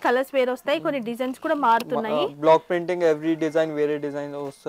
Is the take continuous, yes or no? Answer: yes